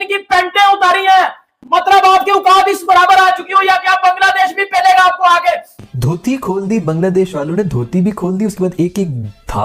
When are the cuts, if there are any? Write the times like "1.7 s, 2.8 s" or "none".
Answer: 1.5 s, 5.7 s